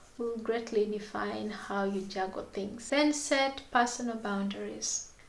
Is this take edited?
yes; 1 cut; at 2.8 s

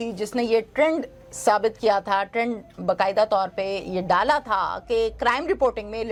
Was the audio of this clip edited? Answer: no; 0 cuts

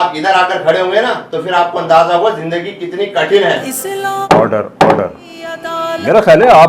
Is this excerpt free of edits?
yes; 0 cuts

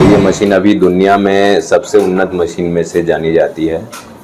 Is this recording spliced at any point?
no; 0 cuts

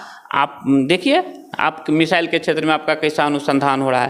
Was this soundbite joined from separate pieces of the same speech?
no; 0 cuts

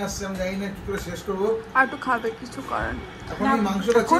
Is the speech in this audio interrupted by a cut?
no; 0 cuts

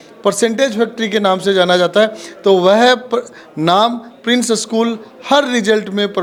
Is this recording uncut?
yes; 0 cuts

